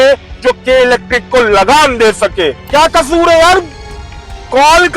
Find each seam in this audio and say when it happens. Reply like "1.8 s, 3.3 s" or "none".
2.6 s